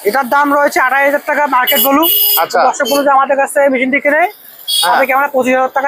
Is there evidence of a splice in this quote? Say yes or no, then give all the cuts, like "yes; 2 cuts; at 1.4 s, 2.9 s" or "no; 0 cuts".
no; 0 cuts